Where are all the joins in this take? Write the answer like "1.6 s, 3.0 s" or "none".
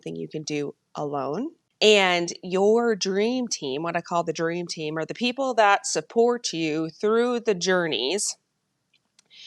1.6 s